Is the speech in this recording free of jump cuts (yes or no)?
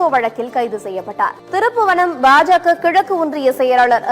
no